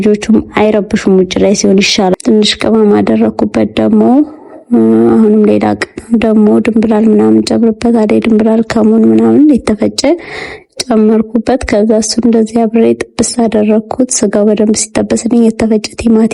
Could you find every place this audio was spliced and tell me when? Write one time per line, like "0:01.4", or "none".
0:02.1